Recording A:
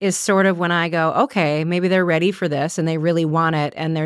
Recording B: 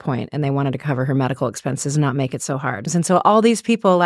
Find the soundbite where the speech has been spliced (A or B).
B